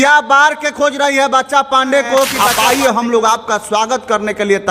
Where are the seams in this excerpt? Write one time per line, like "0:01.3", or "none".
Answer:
0:02.5